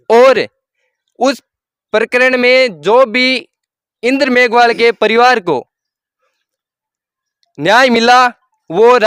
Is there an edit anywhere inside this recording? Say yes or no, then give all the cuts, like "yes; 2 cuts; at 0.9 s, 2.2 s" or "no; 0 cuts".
no; 0 cuts